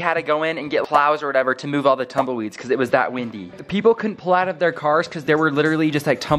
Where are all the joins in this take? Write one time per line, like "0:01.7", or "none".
none